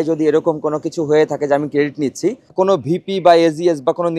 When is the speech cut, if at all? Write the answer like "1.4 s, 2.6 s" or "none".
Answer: 2.5 s